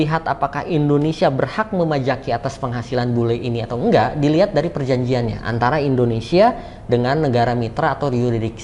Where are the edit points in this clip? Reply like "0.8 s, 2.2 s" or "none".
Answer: none